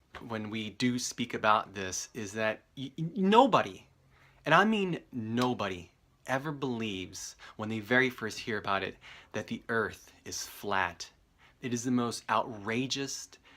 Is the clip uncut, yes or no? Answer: yes